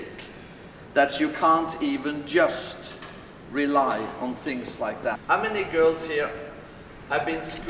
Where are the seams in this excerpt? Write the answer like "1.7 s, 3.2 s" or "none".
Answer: 5.2 s